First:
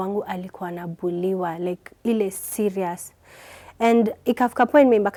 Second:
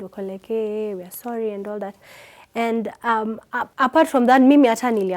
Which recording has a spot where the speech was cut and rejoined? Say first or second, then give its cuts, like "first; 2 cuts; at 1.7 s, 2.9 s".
second; 1 cut; at 3.7 s